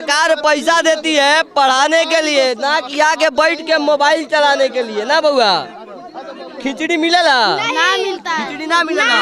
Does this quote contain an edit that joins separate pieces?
no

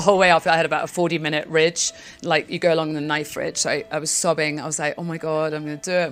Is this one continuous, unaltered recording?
yes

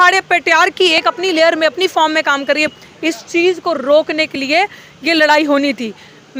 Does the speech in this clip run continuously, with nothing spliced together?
yes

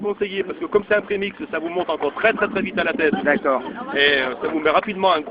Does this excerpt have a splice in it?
no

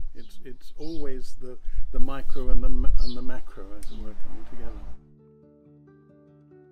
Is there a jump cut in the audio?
yes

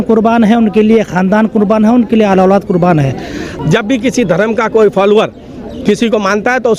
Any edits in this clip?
yes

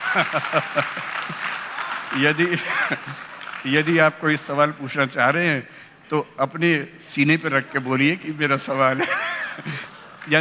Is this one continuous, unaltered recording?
yes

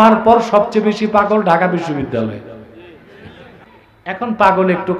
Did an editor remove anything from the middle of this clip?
yes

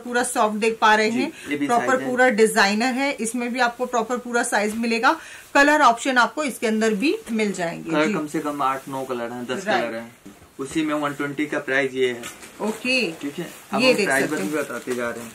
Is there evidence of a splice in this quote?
no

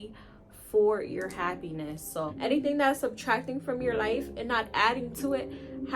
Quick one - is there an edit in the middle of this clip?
yes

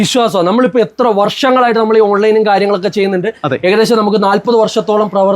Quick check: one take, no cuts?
yes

